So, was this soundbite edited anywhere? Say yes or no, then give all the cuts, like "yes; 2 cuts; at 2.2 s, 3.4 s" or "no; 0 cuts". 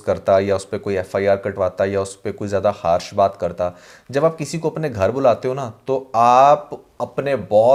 no; 0 cuts